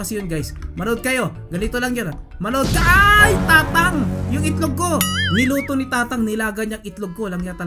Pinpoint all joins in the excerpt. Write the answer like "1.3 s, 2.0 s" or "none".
none